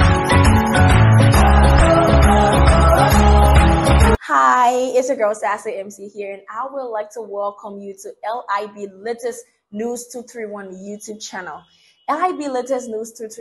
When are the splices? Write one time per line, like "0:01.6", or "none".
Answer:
0:04.2